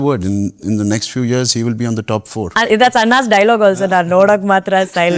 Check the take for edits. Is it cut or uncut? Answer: cut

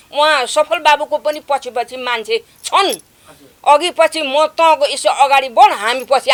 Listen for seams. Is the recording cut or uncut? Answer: uncut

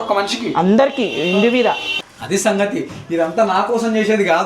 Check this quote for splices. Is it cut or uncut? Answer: cut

